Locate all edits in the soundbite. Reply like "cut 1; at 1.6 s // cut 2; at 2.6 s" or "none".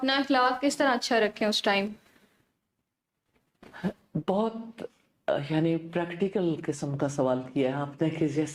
none